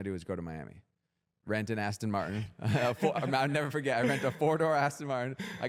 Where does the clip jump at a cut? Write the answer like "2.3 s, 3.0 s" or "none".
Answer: none